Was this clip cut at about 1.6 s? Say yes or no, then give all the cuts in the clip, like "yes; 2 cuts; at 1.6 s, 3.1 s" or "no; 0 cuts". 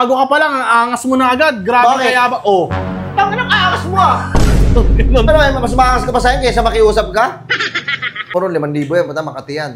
no; 1 cut; at 8.3 s